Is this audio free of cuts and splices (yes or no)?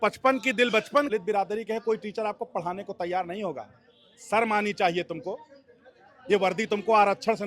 no